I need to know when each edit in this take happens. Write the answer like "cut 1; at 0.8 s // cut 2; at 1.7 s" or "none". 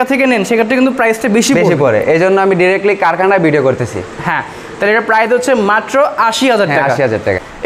none